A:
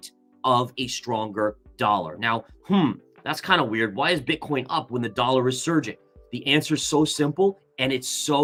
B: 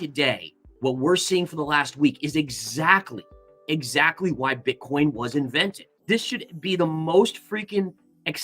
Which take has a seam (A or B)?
B